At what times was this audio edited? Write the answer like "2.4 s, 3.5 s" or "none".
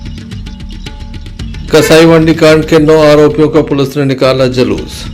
1.2 s